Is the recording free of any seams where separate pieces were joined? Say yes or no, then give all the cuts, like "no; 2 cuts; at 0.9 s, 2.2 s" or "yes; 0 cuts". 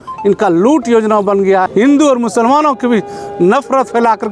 no; 1 cut; at 1.7 s